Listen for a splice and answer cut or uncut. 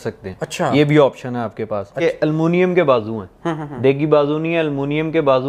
cut